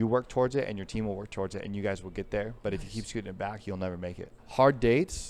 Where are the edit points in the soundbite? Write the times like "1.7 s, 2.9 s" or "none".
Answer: 4.3 s